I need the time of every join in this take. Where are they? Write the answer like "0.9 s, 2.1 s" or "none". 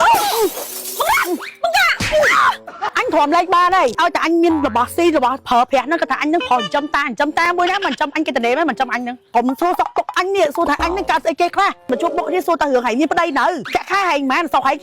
2.8 s, 4.0 s, 9.3 s, 11.9 s, 13.6 s